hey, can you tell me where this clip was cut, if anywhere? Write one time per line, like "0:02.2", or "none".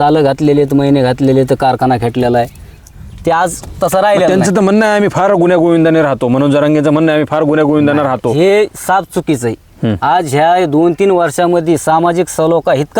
0:02.9